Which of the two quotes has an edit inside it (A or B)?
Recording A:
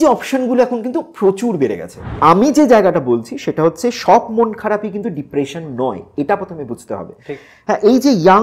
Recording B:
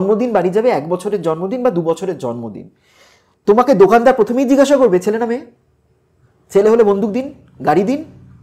A